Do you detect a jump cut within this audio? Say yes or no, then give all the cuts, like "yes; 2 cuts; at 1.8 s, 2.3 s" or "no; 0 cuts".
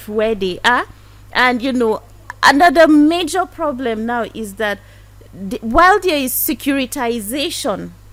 no; 0 cuts